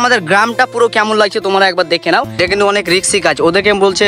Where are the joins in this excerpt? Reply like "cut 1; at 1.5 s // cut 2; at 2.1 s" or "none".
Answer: cut 1; at 2.4 s